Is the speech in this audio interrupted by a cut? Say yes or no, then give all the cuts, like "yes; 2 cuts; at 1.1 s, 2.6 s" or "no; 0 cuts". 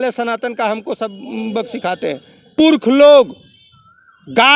yes; 1 cut; at 2.9 s